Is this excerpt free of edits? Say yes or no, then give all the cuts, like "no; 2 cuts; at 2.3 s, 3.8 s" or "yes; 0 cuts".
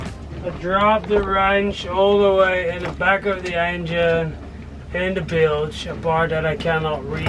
yes; 0 cuts